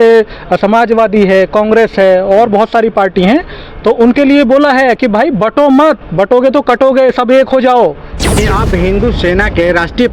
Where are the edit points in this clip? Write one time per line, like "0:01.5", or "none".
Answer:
0:08.4